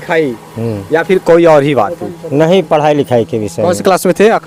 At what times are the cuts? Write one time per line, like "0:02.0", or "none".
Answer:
none